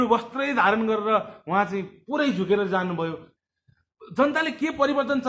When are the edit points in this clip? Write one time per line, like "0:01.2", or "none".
0:03.3